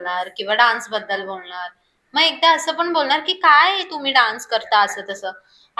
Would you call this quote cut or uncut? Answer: uncut